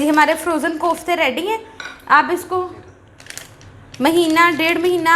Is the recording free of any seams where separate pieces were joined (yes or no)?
yes